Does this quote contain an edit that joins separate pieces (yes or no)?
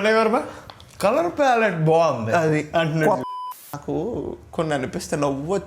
yes